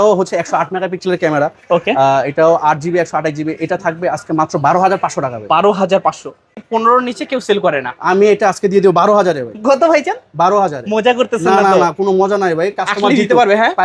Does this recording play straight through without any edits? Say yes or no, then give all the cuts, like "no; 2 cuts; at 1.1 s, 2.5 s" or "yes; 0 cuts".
no; 1 cut; at 6.6 s